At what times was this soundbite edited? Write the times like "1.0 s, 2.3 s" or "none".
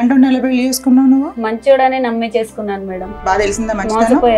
3.1 s